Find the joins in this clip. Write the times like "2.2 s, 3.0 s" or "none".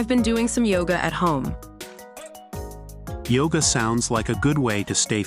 1.6 s, 3.3 s